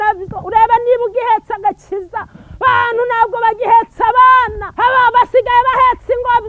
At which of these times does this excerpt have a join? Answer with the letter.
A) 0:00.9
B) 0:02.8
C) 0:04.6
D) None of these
C